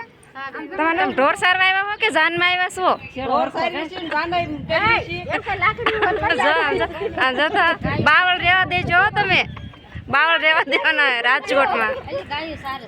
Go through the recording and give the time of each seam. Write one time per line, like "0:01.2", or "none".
0:00.9